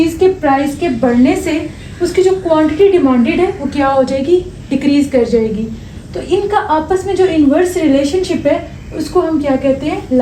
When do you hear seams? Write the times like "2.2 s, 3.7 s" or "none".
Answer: none